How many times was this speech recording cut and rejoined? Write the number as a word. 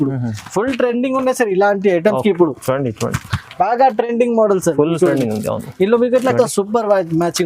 one